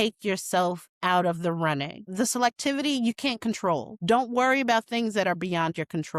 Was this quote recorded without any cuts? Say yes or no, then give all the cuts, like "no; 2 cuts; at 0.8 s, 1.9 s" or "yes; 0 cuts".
no; 2 cuts; at 2.1 s, 3.9 s